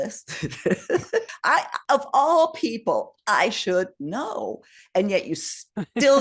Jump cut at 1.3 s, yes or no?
yes